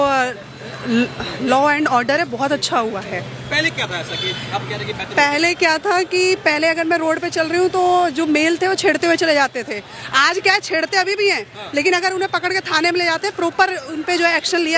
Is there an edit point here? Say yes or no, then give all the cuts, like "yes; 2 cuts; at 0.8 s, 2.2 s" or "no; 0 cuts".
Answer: no; 0 cuts